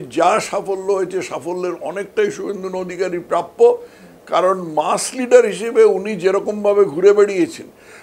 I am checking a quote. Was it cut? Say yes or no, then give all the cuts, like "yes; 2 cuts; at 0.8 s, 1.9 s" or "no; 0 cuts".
no; 0 cuts